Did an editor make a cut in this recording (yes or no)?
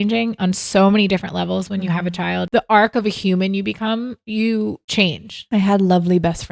yes